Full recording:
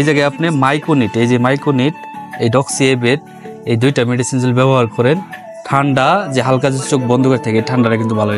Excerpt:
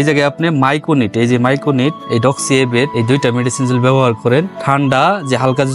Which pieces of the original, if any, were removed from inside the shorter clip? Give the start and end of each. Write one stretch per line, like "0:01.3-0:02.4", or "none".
0:02.0-0:02.3
0:03.2-0:03.6
0:05.3-0:05.6